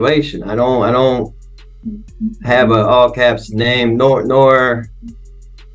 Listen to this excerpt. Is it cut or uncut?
uncut